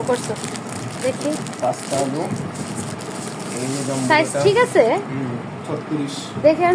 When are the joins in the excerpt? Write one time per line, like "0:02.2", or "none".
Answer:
none